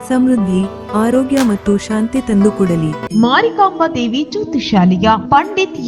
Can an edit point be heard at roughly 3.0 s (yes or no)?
yes